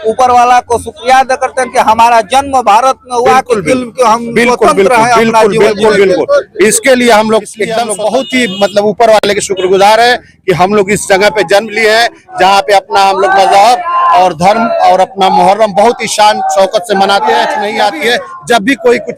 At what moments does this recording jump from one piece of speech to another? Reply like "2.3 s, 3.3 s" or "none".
7.9 s, 17.6 s